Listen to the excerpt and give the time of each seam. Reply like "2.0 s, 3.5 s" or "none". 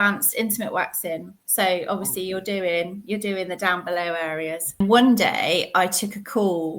4.8 s